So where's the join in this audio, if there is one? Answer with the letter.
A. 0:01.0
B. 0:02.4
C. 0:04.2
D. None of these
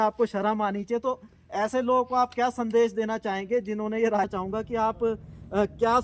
C